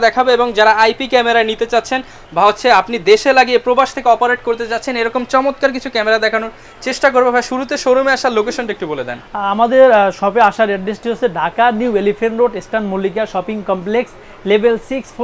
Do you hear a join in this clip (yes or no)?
no